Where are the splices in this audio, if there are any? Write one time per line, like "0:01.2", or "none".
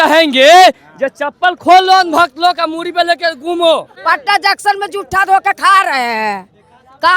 0:03.9